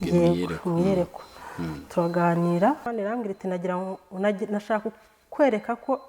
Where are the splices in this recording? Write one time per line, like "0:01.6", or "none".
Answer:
0:02.8